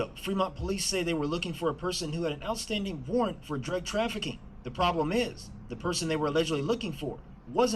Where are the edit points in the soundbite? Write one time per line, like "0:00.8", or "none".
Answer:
0:03.8